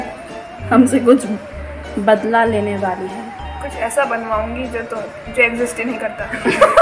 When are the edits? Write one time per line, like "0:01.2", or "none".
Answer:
none